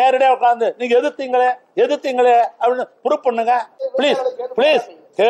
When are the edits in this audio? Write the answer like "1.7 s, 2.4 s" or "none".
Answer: 3.8 s

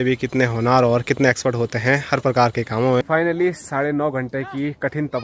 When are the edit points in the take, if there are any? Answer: 3.0 s

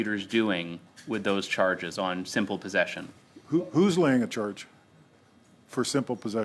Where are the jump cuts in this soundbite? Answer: none

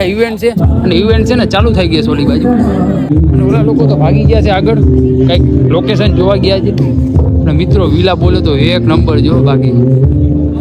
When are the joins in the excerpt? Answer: 3.1 s

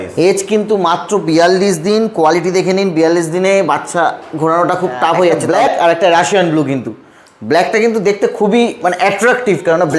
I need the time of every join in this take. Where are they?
5.4 s

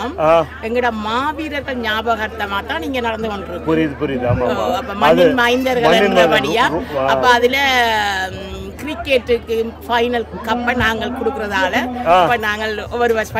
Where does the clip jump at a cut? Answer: none

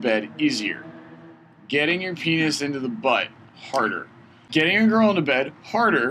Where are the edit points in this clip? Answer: 4.4 s

